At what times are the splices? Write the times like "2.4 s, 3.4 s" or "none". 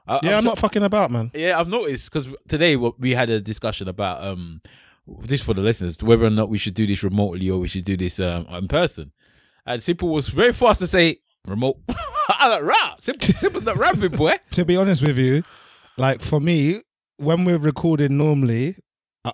2.4 s, 14.5 s